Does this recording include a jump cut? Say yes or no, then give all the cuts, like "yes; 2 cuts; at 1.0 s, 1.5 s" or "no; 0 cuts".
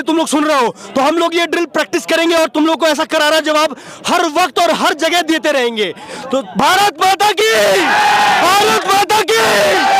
no; 0 cuts